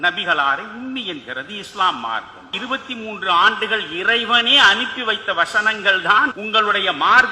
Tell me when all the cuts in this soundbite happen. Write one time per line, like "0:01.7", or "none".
0:02.6
0:06.4